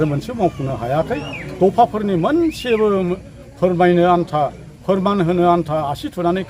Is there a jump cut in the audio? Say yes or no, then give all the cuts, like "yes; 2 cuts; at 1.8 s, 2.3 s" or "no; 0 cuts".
no; 0 cuts